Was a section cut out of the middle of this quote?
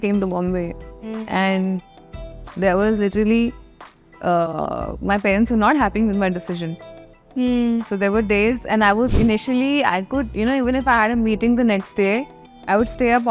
yes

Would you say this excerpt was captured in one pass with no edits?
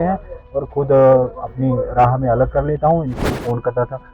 no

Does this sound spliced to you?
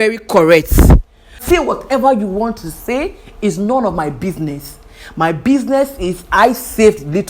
yes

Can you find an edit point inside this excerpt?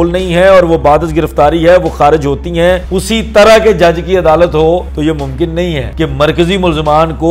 yes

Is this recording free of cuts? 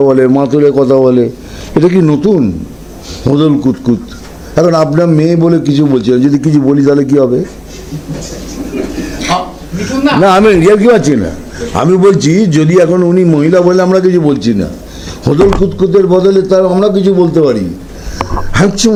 yes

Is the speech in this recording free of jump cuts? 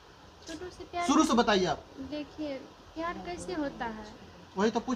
yes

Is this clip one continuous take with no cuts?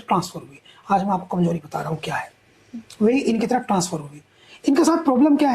yes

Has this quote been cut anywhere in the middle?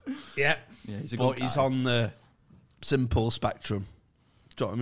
no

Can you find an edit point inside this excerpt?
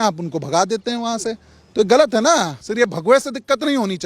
yes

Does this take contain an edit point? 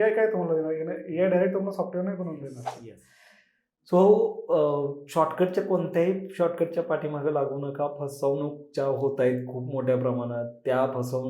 yes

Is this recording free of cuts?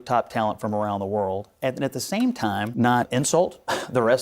no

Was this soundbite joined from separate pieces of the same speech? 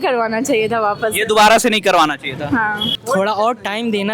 yes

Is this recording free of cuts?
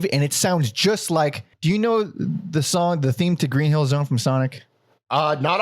no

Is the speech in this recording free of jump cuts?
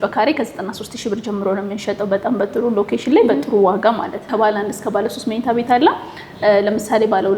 no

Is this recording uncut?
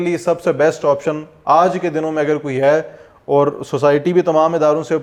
yes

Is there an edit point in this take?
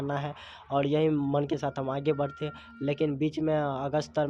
no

